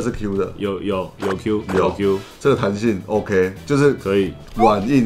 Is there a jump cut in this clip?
no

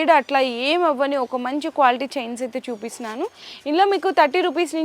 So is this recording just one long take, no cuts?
yes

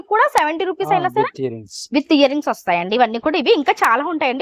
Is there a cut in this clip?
no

